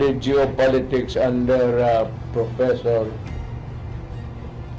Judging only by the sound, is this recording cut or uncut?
uncut